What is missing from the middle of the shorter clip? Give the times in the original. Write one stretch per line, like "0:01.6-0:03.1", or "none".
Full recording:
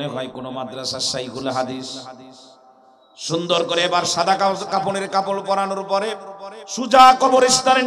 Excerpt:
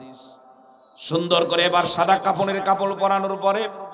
0:04.4-0:04.7